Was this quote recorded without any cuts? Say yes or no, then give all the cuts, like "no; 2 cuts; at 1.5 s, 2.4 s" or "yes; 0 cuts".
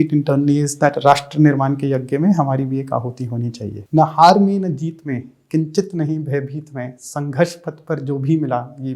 no; 1 cut; at 3.8 s